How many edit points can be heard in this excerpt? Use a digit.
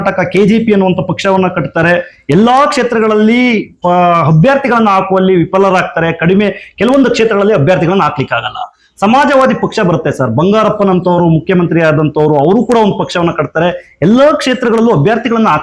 0